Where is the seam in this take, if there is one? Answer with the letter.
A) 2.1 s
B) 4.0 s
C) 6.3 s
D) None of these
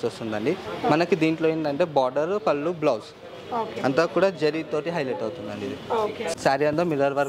C